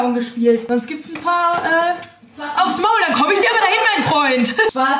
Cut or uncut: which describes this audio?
uncut